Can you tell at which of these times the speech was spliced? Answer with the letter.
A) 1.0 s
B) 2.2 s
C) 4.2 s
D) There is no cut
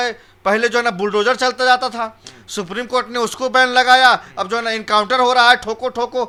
D